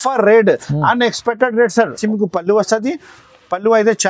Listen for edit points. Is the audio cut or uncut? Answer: cut